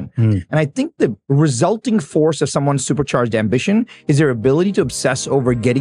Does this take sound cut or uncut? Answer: cut